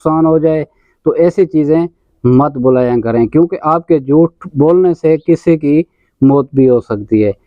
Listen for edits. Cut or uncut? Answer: uncut